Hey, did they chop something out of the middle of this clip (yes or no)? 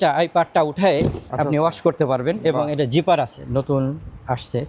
yes